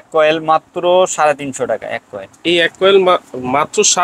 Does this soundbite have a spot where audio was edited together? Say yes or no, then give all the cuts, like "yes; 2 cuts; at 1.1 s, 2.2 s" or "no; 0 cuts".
no; 0 cuts